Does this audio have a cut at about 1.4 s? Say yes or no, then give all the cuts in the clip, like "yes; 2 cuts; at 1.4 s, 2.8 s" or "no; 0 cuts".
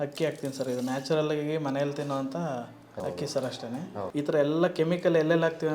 no; 2 cuts; at 3.0 s, 4.1 s